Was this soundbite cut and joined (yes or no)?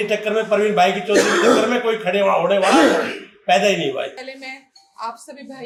no